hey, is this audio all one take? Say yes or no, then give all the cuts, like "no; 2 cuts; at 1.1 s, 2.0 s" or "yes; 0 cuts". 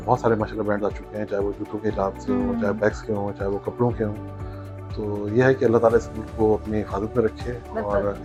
yes; 0 cuts